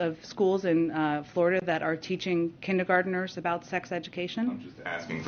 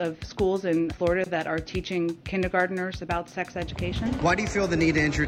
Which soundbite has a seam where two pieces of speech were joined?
second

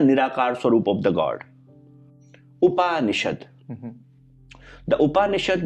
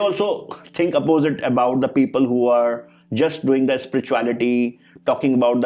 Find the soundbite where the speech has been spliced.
first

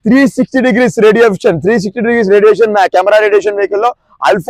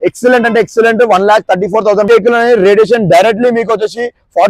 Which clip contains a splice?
second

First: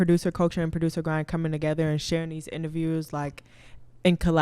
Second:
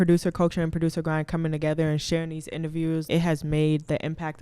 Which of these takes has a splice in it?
second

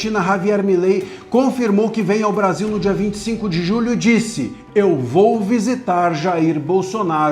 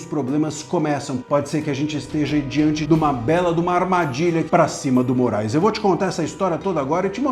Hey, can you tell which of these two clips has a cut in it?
second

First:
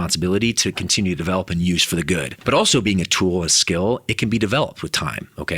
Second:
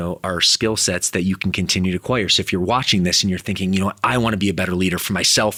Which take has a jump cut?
first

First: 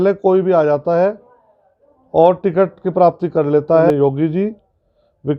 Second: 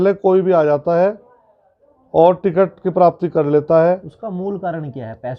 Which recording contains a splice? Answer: first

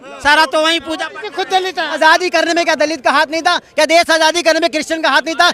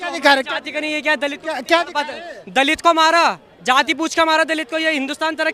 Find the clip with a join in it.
first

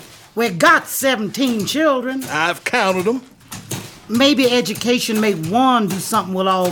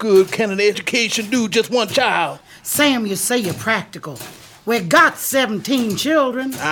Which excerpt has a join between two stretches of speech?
second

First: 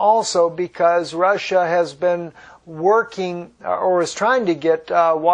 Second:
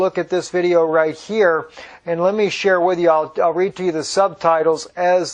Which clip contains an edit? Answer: second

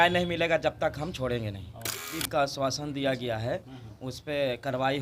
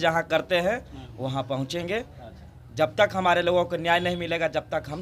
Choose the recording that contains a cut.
first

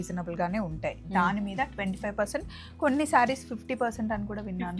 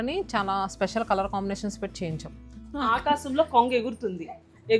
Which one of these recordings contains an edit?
second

